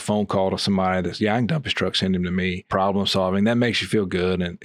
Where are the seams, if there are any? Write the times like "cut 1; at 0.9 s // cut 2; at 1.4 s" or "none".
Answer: cut 1; at 2.7 s